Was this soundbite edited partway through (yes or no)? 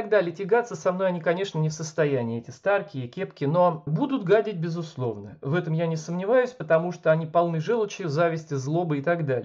no